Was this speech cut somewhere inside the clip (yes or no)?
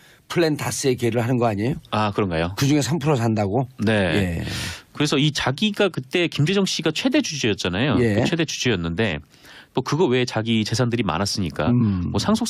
yes